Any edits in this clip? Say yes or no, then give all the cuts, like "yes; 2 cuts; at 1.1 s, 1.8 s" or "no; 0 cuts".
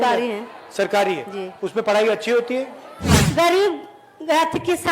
yes; 1 cut; at 3.1 s